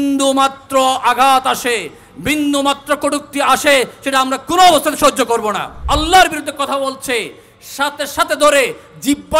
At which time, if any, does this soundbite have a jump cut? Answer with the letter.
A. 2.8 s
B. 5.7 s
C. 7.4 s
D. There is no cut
B